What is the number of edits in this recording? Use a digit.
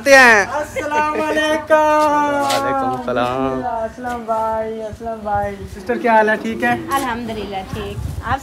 2